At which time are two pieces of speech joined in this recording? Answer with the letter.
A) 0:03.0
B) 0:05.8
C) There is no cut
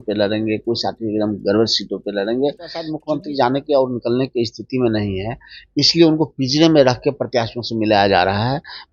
A